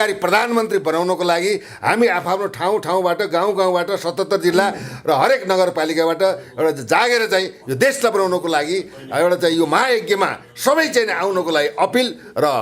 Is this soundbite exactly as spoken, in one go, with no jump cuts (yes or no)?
yes